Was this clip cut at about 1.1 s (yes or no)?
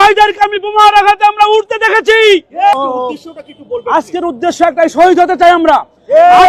no